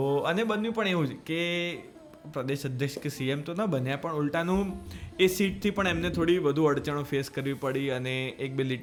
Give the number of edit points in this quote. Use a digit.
0